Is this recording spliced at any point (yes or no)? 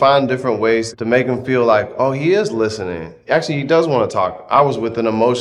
yes